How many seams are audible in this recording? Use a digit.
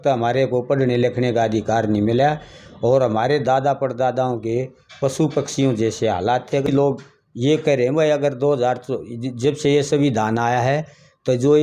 1